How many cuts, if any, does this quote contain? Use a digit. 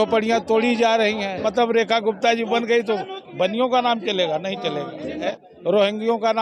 2